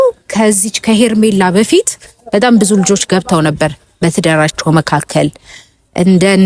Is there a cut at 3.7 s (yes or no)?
no